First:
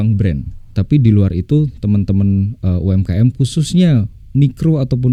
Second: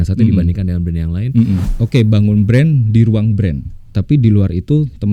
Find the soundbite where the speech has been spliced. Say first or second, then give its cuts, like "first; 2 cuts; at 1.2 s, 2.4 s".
second; 1 cut; at 1.7 s